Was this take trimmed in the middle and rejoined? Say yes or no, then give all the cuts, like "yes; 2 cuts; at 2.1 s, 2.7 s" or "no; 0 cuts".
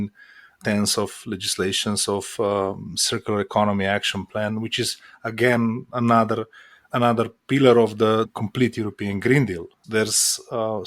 no; 0 cuts